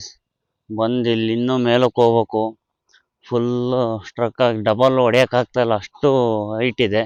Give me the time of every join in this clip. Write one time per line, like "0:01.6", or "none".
none